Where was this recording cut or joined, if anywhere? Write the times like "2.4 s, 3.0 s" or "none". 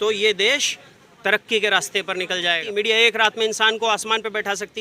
2.6 s